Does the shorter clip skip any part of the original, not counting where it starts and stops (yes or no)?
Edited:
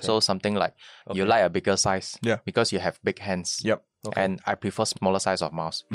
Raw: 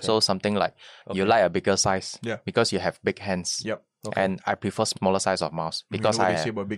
no